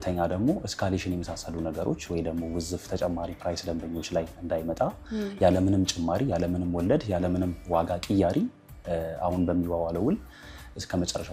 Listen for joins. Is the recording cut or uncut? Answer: uncut